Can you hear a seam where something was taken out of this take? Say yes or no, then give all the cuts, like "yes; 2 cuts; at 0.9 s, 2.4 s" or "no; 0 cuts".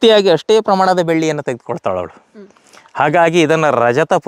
no; 0 cuts